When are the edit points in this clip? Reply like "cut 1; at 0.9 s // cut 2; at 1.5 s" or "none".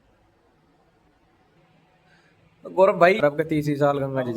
cut 1; at 3.2 s